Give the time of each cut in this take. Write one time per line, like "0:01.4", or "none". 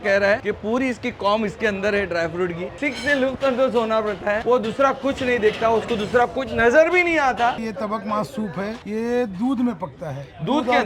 0:02.8
0:07.6